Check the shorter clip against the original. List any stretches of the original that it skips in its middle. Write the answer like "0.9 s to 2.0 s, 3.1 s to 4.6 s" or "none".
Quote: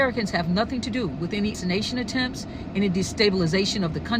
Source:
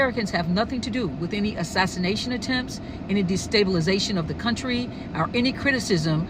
1.6 s to 1.9 s